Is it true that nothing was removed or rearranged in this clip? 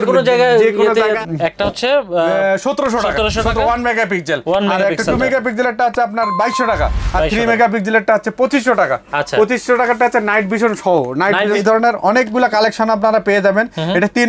no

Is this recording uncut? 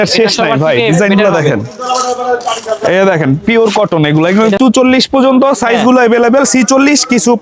no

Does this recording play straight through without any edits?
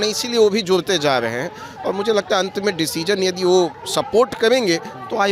yes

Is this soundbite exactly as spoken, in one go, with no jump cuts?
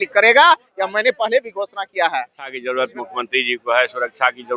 no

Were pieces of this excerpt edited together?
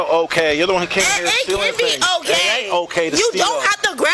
no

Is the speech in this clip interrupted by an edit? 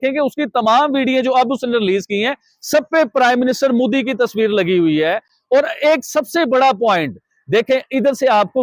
no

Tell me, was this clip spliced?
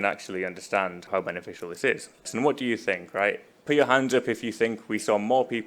yes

